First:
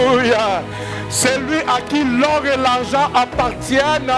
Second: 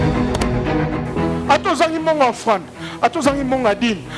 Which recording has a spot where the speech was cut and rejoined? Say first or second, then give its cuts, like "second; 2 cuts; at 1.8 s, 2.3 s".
second; 1 cut; at 1.0 s